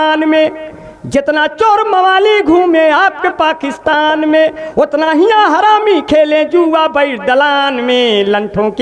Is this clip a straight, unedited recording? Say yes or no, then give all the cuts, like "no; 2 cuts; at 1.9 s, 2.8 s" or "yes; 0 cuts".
yes; 0 cuts